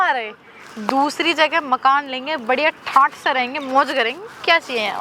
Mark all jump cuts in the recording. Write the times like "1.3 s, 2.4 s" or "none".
none